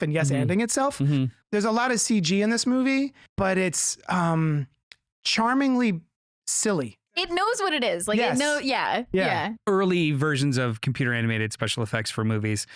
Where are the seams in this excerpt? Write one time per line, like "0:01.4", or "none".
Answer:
0:01.4
0:03.2
0:07.3
0:09.5